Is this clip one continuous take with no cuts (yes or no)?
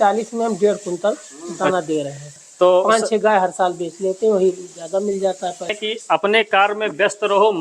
no